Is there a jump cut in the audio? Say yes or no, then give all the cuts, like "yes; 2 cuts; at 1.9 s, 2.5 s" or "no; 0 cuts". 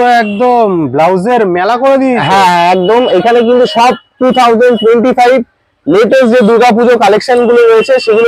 no; 0 cuts